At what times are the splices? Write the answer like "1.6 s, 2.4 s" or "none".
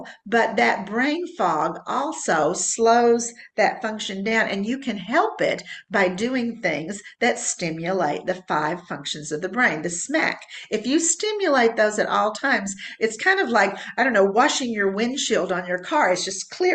none